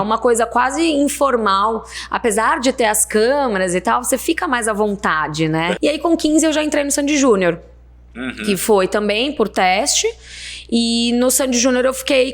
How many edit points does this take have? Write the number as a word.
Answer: one